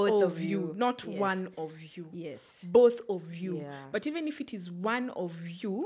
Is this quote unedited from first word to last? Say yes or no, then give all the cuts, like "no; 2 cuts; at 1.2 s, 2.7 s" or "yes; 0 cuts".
yes; 0 cuts